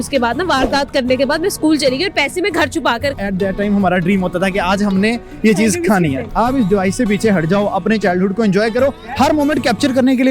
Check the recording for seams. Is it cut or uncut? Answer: cut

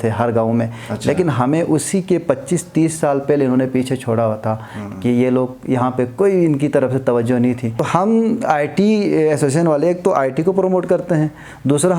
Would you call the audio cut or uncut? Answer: cut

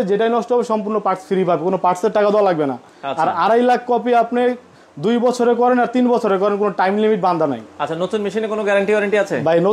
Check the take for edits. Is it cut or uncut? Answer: uncut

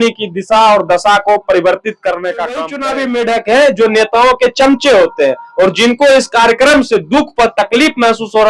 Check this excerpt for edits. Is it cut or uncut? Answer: cut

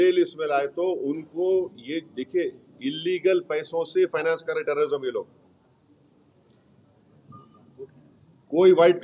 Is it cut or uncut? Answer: uncut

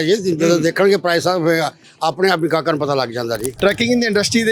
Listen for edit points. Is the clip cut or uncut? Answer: cut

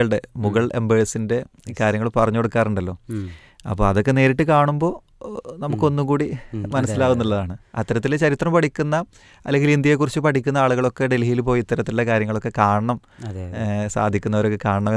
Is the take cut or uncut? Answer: uncut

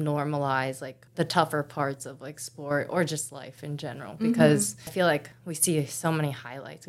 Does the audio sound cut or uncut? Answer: cut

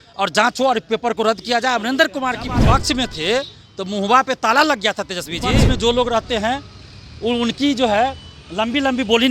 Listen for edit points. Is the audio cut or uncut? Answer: cut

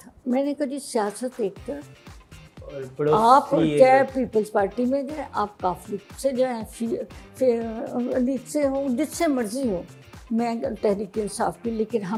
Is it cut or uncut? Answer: uncut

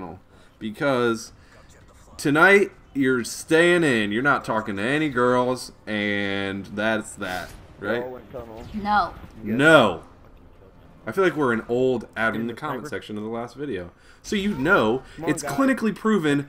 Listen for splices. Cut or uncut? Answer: uncut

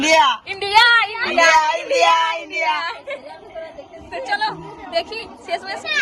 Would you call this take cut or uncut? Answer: uncut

